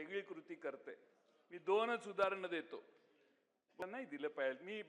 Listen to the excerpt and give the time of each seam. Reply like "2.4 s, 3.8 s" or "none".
3.8 s